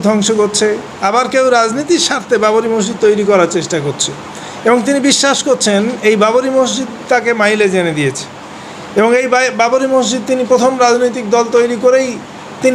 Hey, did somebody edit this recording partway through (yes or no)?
no